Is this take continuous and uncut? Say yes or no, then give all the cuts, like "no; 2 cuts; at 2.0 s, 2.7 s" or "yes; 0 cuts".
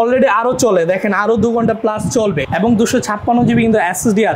no; 1 cut; at 2.4 s